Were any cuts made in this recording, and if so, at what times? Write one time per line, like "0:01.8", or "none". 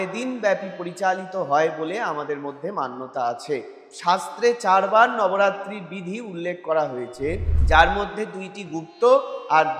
0:03.8